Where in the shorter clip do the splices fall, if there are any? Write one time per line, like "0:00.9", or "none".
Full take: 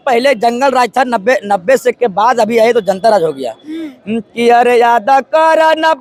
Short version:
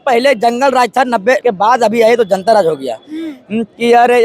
0:01.4